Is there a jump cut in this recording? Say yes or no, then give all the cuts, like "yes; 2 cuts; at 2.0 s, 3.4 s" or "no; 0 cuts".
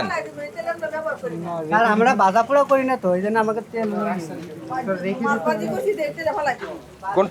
no; 0 cuts